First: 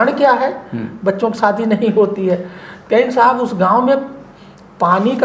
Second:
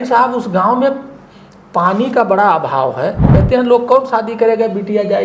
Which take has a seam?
second; 1 cut; at 3.4 s

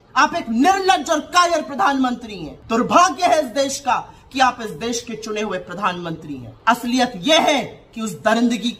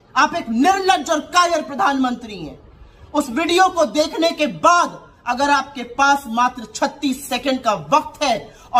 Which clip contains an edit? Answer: first; 2 cuts; at 2.5 s, 6.5 s

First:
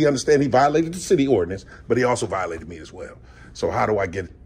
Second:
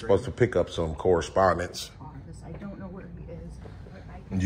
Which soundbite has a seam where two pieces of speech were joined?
second; 1 cut; at 1.9 s

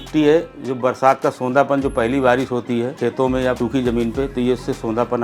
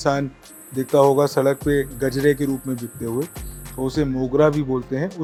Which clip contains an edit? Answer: first; 1 cut; at 3.2 s

